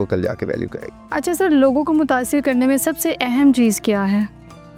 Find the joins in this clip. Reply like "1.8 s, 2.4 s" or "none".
none